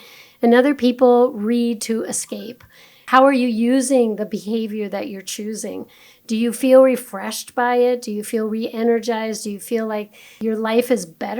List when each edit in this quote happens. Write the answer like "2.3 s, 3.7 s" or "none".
3.0 s, 10.2 s